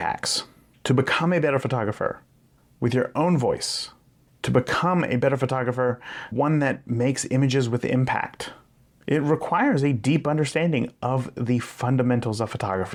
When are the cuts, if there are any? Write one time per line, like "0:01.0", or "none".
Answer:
none